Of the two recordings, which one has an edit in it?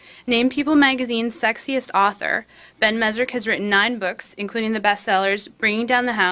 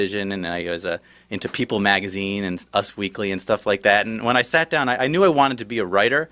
first; 1 cut; at 1.6 s

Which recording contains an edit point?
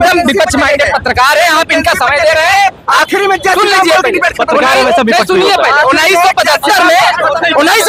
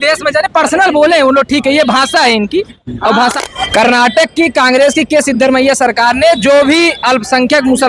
second; 1 cut; at 3.4 s

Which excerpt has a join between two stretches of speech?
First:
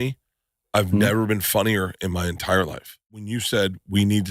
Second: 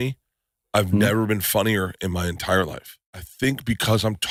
first; 1 cut; at 3.3 s

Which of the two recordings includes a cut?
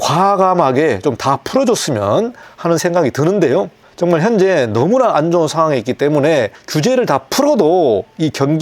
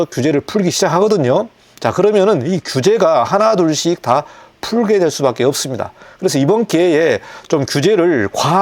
first; 2 cuts; at 2.4 s, 6.6 s

